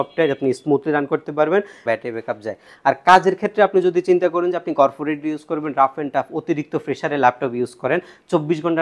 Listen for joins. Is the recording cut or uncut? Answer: cut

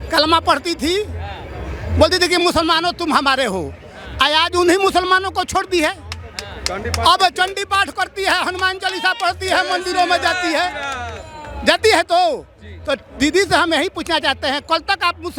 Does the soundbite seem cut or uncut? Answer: uncut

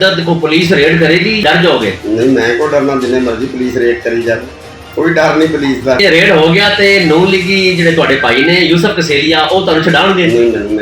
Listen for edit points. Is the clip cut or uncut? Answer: cut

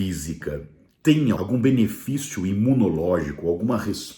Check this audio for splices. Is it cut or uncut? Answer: cut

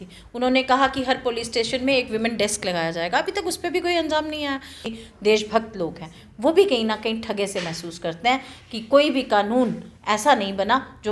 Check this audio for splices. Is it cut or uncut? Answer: cut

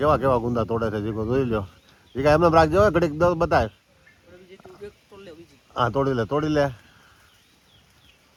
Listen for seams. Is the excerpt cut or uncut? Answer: uncut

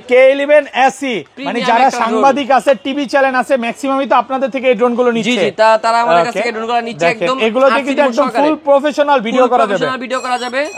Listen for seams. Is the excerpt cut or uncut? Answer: uncut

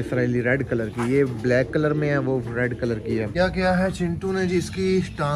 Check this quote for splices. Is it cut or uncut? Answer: cut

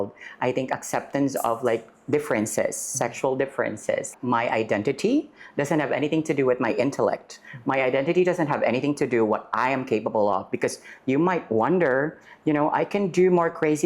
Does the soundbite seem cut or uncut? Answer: cut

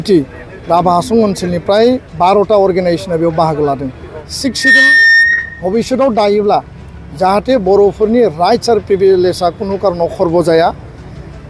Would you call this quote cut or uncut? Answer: cut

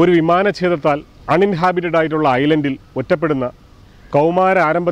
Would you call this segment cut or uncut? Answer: cut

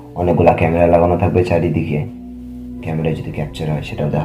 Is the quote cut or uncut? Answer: cut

